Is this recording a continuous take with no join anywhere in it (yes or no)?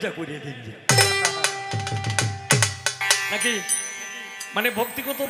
yes